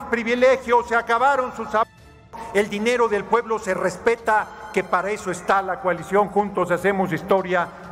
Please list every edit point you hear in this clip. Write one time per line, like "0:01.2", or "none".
none